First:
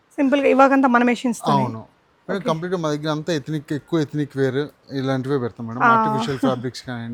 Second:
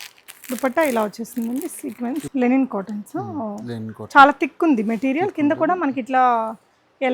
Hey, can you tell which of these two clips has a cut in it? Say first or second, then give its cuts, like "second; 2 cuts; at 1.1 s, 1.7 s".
second; 1 cut; at 2.3 s